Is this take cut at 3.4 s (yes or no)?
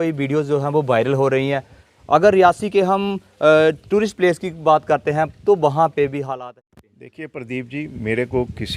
no